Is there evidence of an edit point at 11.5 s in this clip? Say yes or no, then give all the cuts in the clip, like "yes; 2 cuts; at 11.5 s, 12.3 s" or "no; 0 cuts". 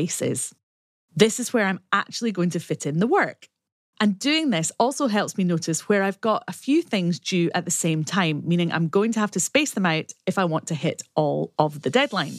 yes; 1 cut; at 11.5 s